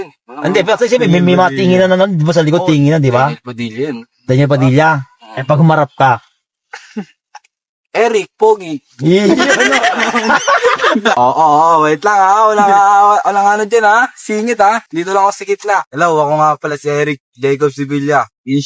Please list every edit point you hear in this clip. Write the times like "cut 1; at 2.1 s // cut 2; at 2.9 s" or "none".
cut 1; at 11.1 s